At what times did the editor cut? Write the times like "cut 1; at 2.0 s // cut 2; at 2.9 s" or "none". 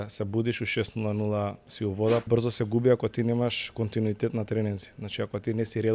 cut 1; at 2.3 s